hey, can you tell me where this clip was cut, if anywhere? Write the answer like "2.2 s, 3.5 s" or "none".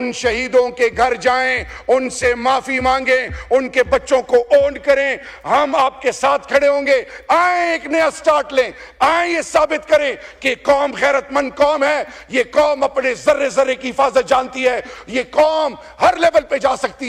none